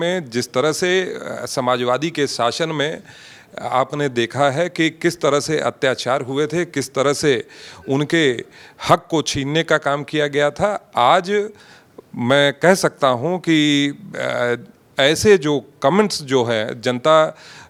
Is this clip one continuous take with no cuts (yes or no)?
yes